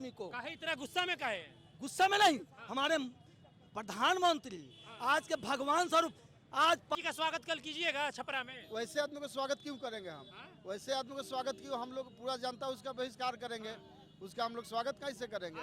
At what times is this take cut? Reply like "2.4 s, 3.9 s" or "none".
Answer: 7.0 s